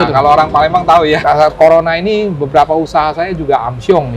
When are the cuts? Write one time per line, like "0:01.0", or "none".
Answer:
0:01.2